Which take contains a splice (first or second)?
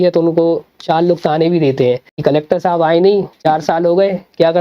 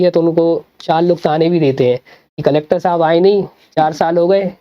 first